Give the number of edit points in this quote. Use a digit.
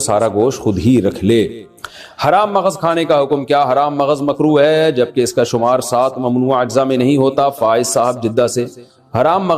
0